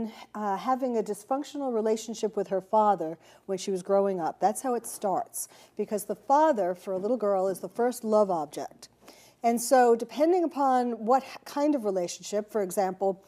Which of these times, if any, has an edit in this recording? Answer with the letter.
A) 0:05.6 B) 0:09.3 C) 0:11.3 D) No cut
C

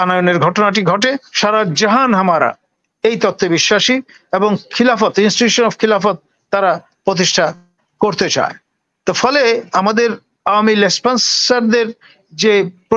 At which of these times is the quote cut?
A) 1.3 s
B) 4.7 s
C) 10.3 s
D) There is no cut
A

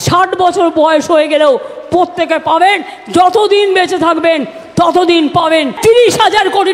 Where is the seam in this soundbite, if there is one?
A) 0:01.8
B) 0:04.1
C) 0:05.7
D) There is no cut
C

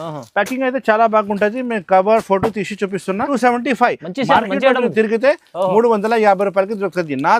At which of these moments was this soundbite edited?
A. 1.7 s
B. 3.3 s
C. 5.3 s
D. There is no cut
B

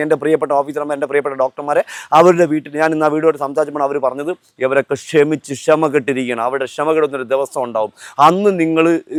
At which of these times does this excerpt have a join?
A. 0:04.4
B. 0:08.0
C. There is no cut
C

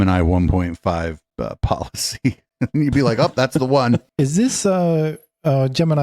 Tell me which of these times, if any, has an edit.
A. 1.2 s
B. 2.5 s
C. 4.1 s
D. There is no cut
C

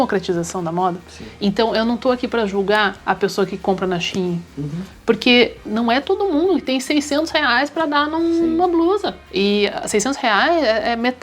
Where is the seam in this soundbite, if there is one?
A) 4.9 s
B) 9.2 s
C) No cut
B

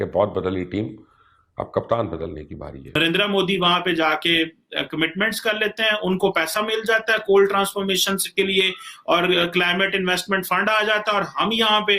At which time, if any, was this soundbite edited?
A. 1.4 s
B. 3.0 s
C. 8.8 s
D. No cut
B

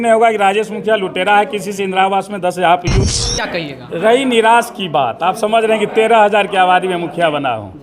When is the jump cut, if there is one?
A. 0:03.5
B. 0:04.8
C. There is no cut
A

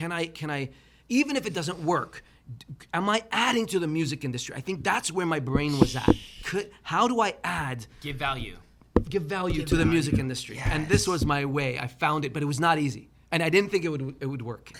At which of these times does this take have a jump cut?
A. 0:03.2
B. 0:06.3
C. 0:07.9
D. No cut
D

